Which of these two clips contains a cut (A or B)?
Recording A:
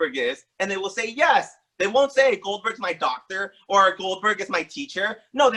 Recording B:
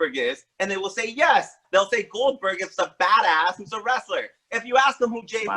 B